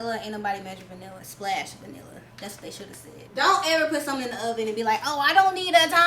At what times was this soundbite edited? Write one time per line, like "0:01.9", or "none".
0:01.1
0:03.2

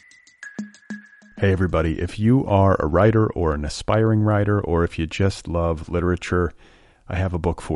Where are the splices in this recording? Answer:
0:00.9

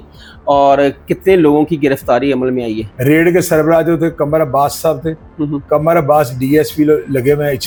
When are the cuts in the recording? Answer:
none

